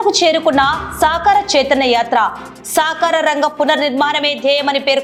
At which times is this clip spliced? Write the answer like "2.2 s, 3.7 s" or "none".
none